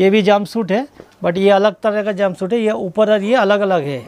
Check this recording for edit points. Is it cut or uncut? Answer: uncut